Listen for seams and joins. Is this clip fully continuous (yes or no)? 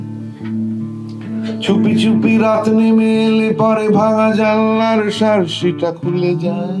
yes